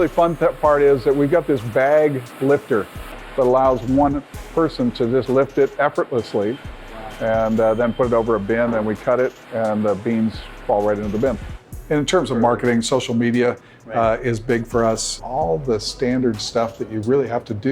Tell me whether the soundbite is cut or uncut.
cut